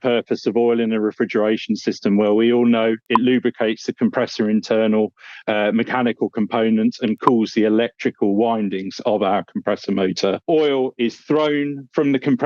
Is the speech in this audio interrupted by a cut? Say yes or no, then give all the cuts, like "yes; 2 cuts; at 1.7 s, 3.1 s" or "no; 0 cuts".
yes; 1 cut; at 10.4 s